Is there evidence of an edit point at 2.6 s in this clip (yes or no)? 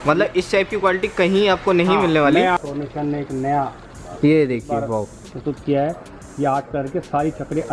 yes